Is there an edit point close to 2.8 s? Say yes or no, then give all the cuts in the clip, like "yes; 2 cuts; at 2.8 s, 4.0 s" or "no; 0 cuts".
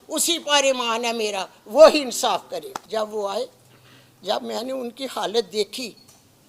yes; 1 cut; at 2.8 s